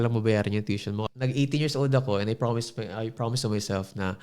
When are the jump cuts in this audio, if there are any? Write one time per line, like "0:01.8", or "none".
0:01.0

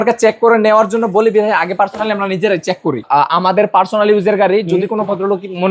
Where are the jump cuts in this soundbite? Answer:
0:03.0

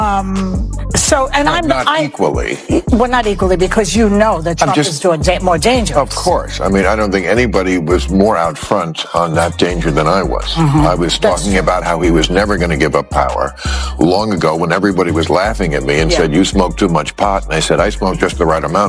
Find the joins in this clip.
none

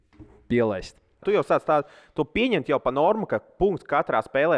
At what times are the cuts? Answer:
0:01.2

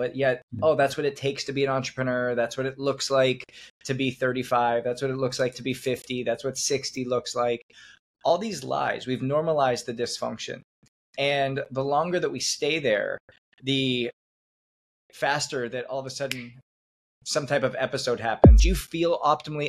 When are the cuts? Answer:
0:18.5

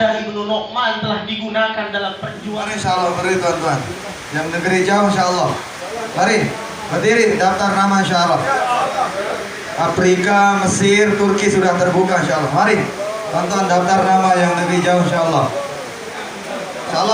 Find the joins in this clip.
0:02.4
0:16.1

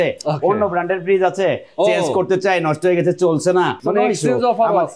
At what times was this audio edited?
none

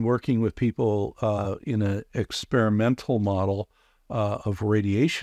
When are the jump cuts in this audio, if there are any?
none

